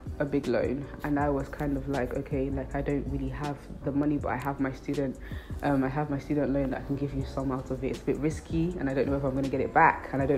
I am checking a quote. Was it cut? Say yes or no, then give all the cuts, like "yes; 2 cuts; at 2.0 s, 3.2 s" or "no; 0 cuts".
no; 0 cuts